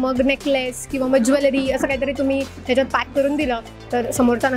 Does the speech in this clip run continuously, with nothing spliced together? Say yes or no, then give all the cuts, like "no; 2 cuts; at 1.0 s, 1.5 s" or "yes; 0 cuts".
yes; 0 cuts